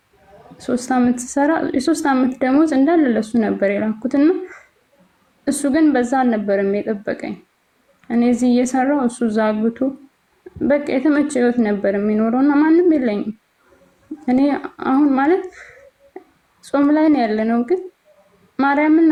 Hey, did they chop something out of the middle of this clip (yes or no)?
no